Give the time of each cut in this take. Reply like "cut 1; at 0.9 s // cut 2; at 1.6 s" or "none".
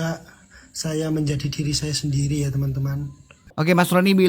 cut 1; at 3.4 s